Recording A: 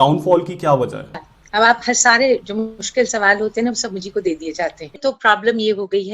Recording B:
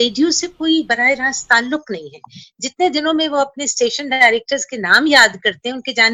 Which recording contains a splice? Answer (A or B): A